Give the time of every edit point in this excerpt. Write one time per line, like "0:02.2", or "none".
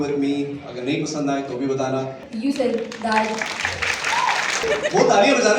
0:02.3
0:04.6